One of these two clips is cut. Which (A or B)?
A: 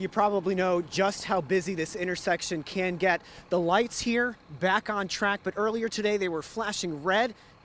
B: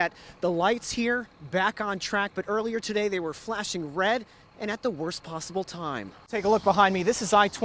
B